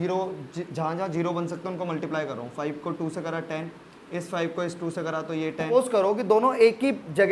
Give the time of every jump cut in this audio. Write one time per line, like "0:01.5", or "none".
0:05.7